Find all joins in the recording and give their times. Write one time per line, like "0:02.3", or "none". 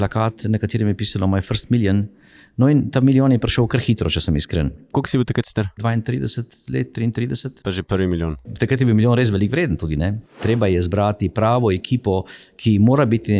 0:04.9
0:05.8
0:08.4
0:10.4